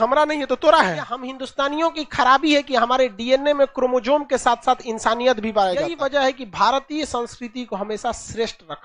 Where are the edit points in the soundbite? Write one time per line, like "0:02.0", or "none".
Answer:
0:01.4
0:05.9